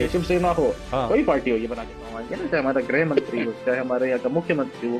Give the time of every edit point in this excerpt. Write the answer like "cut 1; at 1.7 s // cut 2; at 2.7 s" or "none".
cut 1; at 2.0 s